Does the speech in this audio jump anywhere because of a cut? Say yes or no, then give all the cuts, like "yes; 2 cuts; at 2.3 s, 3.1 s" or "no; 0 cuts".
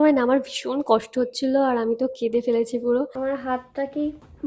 yes; 1 cut; at 3.1 s